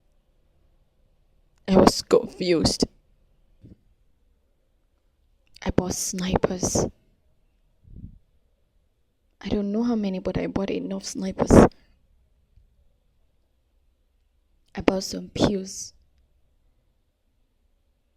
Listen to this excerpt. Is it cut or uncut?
cut